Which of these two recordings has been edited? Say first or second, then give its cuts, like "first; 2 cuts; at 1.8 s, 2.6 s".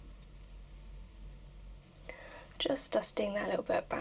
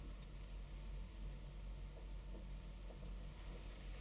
first; 1 cut; at 1.8 s